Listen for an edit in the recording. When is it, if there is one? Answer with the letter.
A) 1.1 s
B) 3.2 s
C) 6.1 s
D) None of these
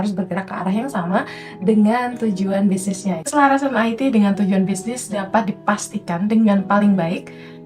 B